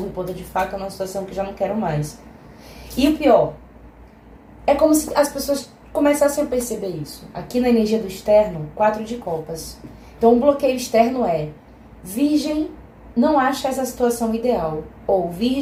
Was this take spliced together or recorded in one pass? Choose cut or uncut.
uncut